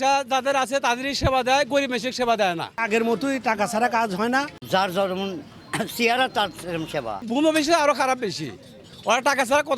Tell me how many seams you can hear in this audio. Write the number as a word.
three